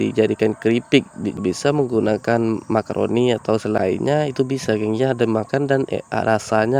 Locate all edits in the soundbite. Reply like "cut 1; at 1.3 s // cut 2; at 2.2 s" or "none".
cut 1; at 1.4 s // cut 2; at 3.8 s